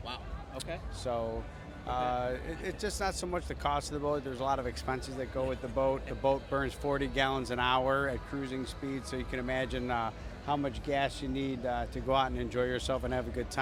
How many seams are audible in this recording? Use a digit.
0